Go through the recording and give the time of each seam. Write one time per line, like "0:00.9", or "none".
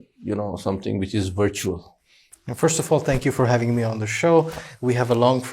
none